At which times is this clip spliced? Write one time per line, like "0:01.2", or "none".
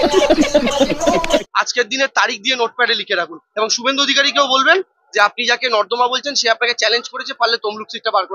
0:01.4
0:07.2